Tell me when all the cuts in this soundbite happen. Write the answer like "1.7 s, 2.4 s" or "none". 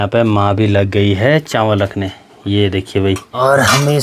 none